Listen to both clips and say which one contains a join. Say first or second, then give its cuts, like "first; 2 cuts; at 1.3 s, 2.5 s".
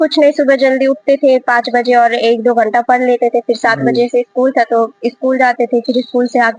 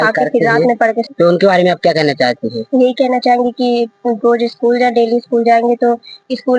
second; 1 cut; at 1.1 s